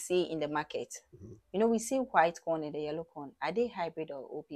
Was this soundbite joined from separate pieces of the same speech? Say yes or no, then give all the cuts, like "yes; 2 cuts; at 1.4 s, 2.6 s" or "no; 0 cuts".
no; 0 cuts